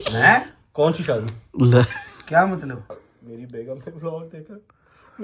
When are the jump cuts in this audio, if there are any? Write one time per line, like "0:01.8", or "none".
0:02.9

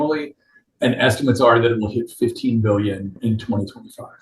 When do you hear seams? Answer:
0:03.1

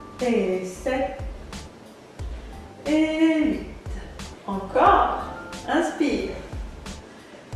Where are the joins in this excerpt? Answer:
none

